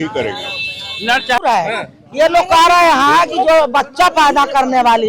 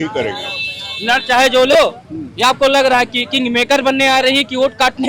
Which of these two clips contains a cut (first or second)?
first